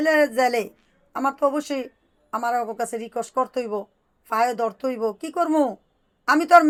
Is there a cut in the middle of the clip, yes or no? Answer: no